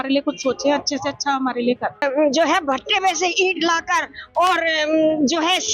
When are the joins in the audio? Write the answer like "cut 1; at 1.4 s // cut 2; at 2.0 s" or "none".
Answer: cut 1; at 2.0 s

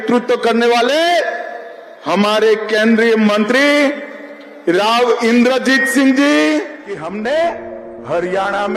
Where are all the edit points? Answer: cut 1; at 6.8 s

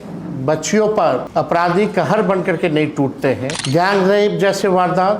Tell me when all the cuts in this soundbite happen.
cut 1; at 1.3 s // cut 2; at 3.5 s

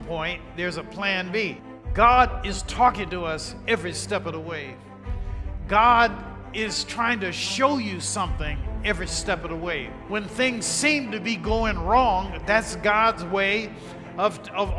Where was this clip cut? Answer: none

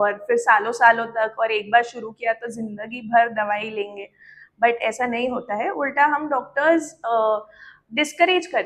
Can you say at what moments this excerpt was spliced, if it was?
none

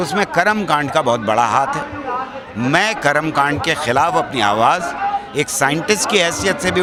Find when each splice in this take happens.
none

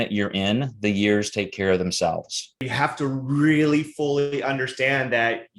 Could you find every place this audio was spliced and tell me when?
cut 1; at 2.7 s

